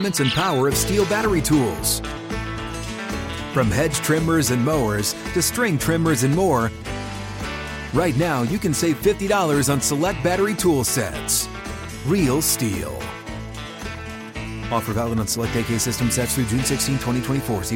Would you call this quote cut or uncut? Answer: uncut